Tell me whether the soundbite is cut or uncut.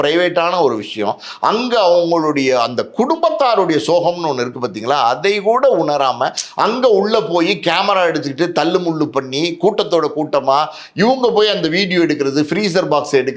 uncut